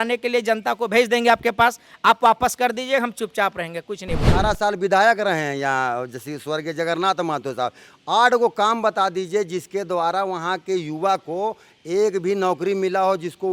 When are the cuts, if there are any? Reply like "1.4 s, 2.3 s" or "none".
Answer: 4.3 s